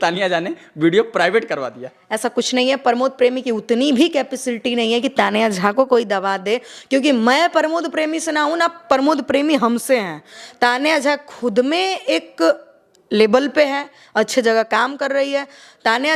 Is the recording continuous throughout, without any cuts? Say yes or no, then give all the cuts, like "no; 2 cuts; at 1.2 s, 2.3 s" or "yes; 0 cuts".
yes; 0 cuts